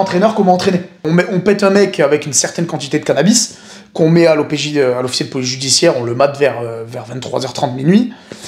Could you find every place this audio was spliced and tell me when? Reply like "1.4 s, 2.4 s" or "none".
1.1 s